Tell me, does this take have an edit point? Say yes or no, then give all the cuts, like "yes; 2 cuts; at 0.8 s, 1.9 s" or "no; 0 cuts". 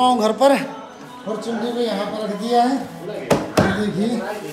no; 0 cuts